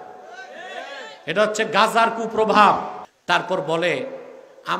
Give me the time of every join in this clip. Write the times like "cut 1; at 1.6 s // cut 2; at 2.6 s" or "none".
cut 1; at 3.0 s